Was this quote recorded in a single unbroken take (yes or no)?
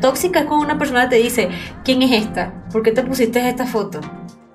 yes